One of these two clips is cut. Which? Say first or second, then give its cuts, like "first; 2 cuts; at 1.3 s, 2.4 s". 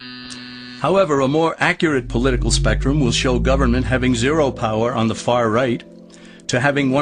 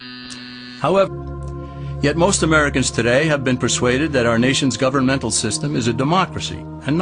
first; 1 cut; at 1.1 s